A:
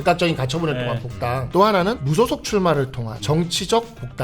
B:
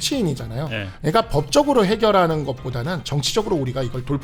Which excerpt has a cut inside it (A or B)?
A